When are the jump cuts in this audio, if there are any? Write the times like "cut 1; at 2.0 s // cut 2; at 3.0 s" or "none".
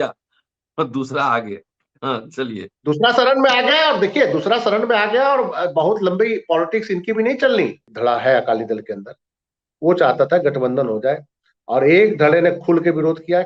cut 1; at 7.9 s

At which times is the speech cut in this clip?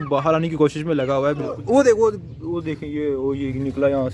cut 1; at 1.6 s

